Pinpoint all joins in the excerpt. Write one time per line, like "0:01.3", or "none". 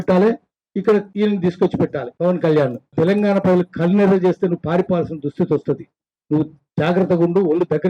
0:01.1
0:02.1
0:02.9